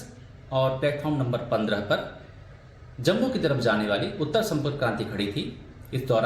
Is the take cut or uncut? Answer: cut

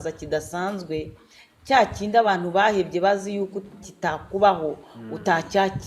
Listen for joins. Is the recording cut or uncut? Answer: uncut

